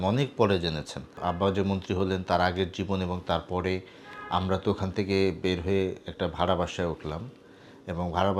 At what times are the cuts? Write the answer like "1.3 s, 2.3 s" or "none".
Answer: 1.2 s